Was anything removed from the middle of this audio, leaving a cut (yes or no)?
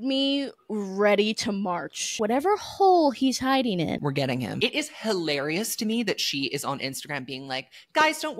yes